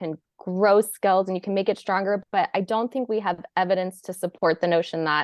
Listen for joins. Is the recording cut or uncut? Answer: uncut